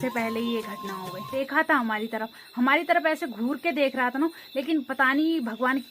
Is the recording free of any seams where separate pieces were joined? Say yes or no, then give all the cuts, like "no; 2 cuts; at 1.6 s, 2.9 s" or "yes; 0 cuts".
no; 1 cut; at 1.3 s